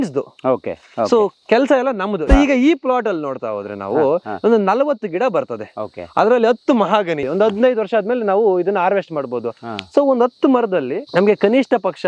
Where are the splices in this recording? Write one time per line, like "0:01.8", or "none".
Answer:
0:02.2
0:07.3
0:11.0